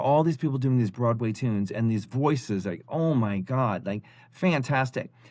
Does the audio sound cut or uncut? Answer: uncut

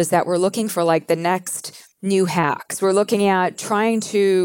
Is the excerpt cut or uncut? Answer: cut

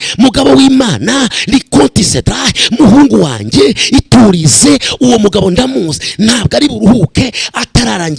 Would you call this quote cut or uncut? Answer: uncut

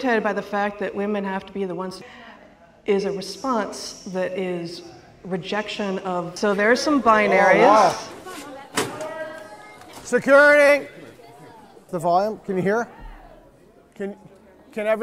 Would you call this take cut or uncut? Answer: cut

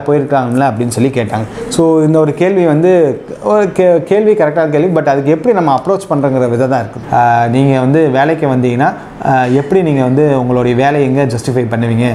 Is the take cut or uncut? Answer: cut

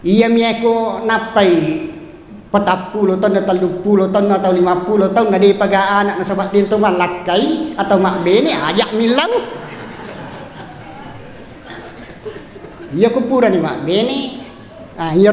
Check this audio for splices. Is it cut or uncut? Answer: uncut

